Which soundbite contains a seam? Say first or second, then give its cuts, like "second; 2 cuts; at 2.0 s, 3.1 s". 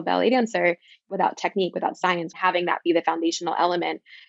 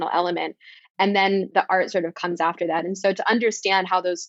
first; 2 cuts; at 1.1 s, 2.4 s